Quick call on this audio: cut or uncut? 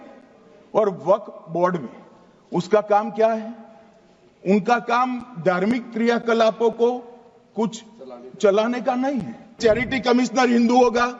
cut